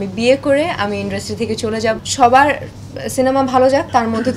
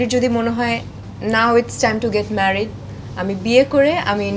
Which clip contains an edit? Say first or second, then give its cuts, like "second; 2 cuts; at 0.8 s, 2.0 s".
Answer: first; 1 cut; at 2.0 s